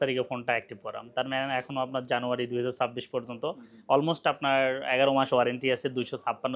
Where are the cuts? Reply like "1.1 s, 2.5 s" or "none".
none